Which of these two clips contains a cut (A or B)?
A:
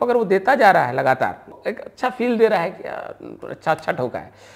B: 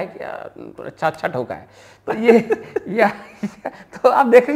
A